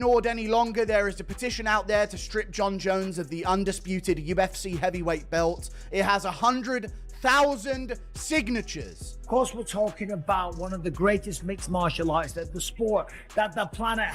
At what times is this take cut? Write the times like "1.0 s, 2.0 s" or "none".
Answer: 9.1 s